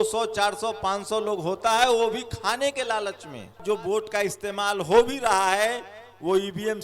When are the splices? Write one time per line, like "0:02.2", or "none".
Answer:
0:03.6